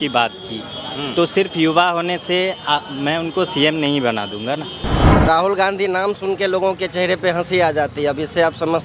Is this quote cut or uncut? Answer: cut